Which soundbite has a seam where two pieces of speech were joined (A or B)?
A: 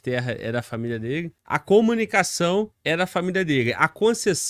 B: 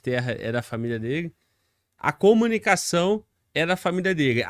A